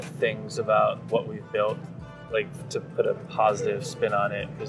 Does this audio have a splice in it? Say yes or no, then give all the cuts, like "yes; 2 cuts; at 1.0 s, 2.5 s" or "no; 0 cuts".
no; 0 cuts